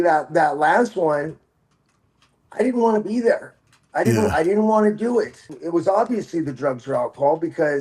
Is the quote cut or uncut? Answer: cut